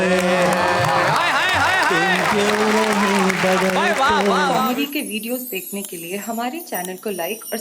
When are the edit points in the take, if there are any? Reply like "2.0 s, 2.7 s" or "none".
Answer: 4.6 s